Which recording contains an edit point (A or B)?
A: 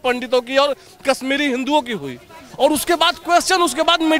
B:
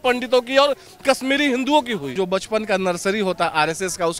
B